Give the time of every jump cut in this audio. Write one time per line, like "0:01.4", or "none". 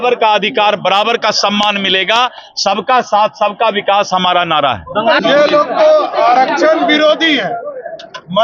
0:05.2

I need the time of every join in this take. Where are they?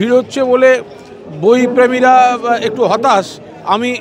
none

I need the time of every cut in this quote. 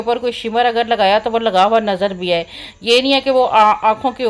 none

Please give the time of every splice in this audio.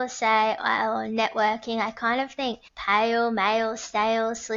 0:02.7

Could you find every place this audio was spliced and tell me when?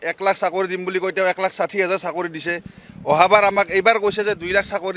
none

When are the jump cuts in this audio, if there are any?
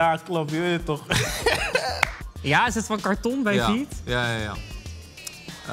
0:02.2

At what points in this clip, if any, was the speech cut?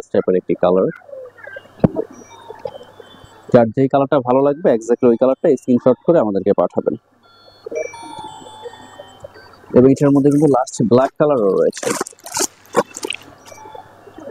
none

